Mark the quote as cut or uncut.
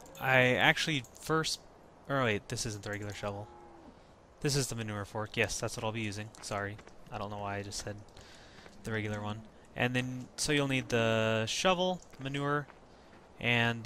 cut